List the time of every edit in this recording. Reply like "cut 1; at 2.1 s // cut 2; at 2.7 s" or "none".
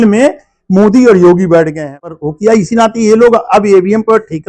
cut 1; at 2.1 s

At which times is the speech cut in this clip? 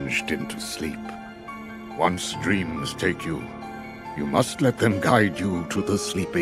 cut 1; at 1.5 s

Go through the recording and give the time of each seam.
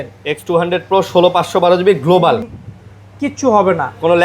cut 1; at 2.4 s

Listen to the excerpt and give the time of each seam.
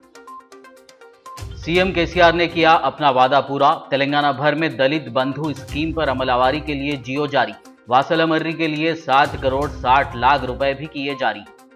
cut 1; at 1.4 s

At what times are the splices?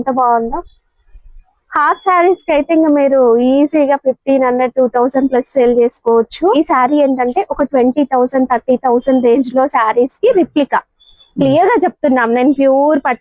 cut 1; at 6.5 s

